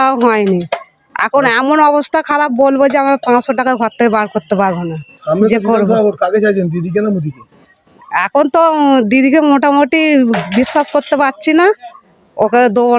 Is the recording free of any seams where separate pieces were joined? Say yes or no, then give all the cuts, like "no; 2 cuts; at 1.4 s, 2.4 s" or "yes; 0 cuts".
yes; 0 cuts